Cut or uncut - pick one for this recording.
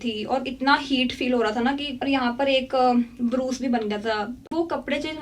cut